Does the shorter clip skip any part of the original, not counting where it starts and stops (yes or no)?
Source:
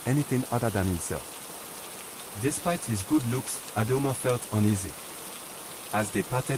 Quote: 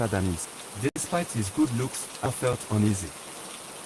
yes